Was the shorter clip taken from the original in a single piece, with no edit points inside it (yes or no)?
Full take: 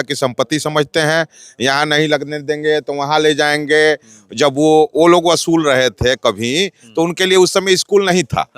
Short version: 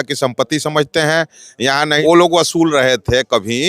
no